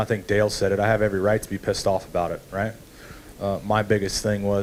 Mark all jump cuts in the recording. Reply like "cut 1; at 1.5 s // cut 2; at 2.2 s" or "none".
none